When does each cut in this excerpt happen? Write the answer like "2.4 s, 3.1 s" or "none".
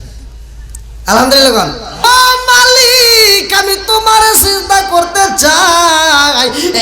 2.0 s